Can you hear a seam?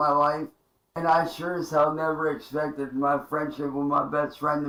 no; 0 cuts

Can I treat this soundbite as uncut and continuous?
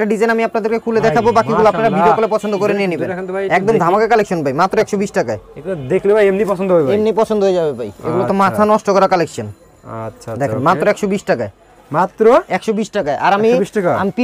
yes; 0 cuts

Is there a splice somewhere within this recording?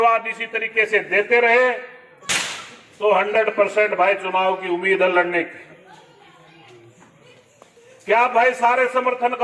no; 0 cuts

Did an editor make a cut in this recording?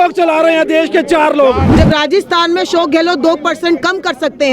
yes; 1 cut; at 1.7 s

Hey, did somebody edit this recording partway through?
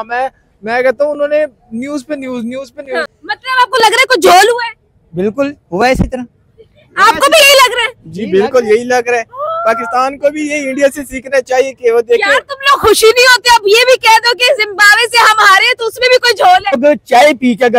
yes; 2 cuts; at 3.1 s, 16.8 s

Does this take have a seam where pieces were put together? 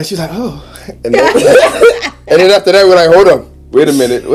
no; 0 cuts

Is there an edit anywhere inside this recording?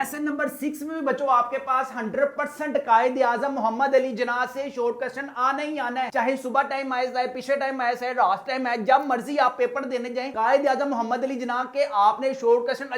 no; 0 cuts

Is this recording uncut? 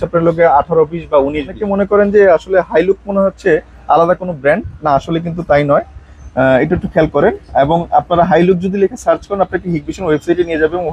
no; 1 cut; at 1.6 s

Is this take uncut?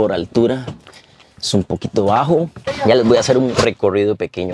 no; 2 cuts; at 2.7 s, 3.6 s

